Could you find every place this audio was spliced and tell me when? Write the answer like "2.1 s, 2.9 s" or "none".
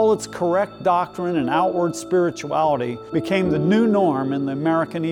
3.0 s

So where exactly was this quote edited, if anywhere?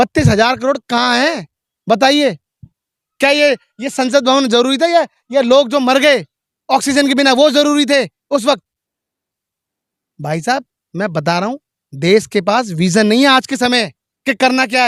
none

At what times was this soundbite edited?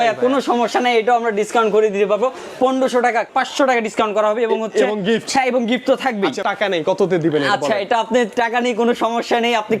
3.3 s, 6.4 s

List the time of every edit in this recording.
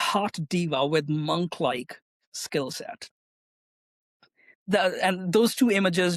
none

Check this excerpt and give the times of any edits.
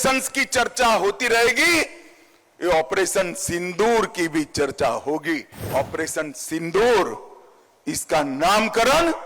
5.7 s

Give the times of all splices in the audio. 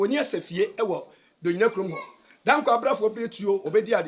none

